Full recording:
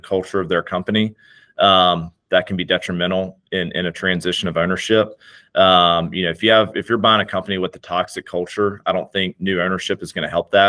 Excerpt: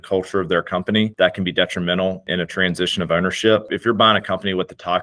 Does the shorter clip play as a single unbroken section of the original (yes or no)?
no